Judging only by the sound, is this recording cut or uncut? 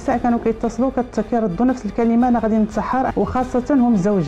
cut